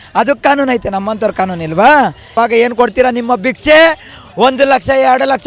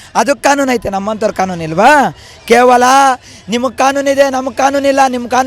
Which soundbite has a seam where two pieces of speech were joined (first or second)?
first